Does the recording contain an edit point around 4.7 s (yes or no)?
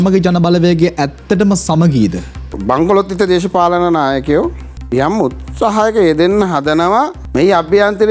yes